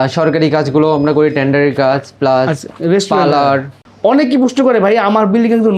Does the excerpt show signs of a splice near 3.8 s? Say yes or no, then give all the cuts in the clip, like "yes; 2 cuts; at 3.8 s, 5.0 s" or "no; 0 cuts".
yes; 2 cuts; at 2.7 s, 3.8 s